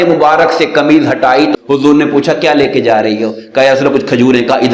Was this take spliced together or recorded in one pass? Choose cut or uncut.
cut